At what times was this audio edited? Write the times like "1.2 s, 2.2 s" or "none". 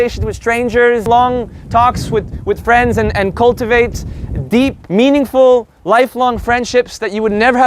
1.1 s, 4.8 s, 5.7 s